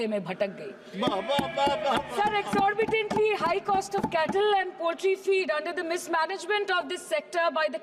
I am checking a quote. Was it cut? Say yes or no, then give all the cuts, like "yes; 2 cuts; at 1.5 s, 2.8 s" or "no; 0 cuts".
no; 0 cuts